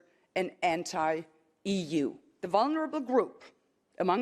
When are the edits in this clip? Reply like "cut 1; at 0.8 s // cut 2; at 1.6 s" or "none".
cut 1; at 2.3 s